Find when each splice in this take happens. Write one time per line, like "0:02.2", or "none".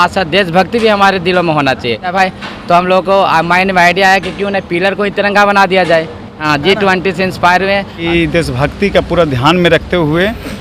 0:02.1
0:06.4
0:08.0